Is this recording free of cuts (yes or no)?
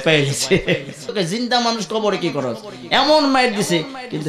no